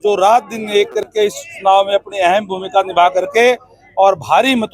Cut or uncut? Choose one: uncut